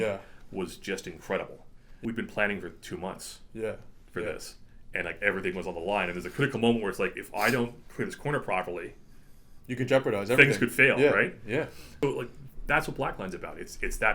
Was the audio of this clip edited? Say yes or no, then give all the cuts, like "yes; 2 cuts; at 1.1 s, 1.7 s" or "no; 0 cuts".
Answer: yes; 2 cuts; at 1.8 s, 11.8 s